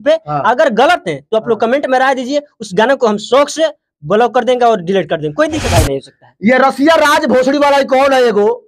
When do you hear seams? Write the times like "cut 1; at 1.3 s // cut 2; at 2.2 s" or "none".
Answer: cut 1; at 5.7 s